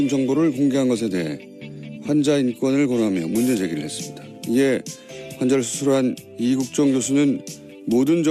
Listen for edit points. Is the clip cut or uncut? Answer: uncut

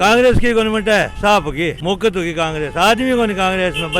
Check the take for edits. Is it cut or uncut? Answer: cut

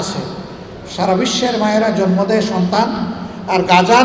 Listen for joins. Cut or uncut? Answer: uncut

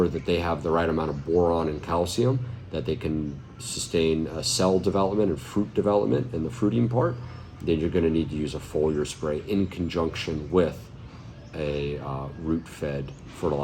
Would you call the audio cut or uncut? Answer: uncut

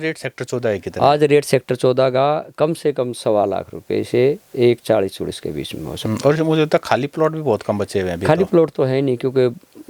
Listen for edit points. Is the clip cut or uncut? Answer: uncut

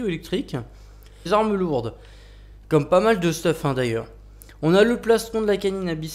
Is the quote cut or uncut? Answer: uncut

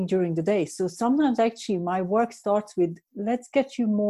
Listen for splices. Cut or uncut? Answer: uncut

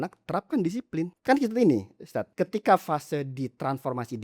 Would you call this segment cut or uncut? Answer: cut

